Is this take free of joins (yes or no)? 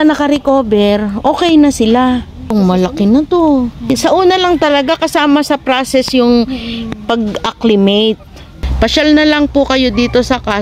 no